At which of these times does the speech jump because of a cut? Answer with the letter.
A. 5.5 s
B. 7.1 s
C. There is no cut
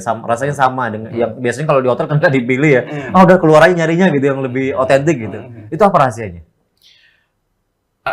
B